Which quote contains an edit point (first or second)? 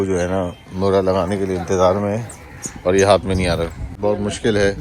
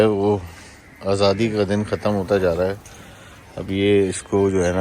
first